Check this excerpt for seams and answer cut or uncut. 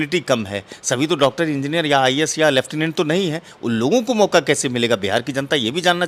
uncut